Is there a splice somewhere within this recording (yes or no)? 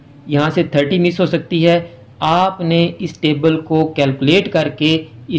no